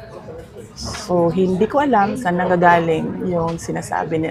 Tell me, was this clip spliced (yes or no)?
no